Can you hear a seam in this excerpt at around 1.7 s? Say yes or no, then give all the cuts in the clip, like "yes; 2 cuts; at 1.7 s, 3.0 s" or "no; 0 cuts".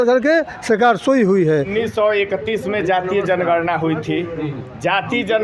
yes; 1 cut; at 1.7 s